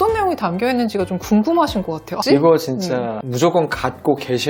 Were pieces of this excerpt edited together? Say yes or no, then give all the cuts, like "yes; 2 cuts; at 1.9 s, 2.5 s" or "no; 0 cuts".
yes; 1 cut; at 2.1 s